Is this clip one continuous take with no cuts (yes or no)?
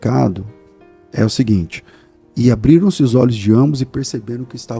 yes